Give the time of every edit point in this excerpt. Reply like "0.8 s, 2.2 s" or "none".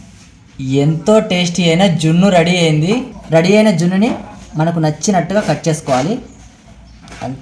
3.1 s